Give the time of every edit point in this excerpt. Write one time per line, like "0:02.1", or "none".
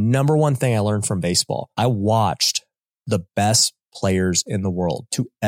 0:01.7